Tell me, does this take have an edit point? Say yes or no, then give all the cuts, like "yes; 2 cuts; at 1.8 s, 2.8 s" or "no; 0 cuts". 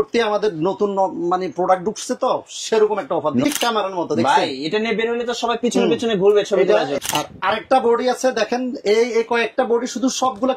yes; 2 cuts; at 3.4 s, 6.9 s